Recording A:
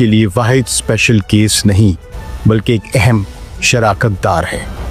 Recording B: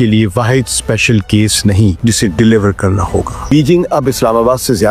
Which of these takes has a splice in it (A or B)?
B